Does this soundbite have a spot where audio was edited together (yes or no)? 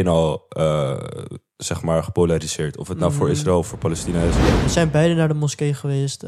yes